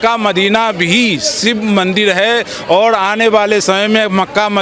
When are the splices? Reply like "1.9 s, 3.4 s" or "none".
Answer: none